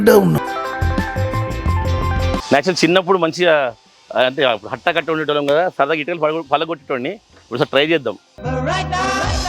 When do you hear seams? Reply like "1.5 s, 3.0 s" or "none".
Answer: 2.4 s